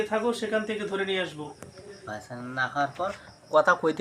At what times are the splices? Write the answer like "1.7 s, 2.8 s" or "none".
2.1 s